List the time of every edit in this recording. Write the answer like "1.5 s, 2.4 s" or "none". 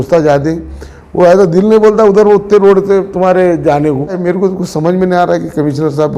4.2 s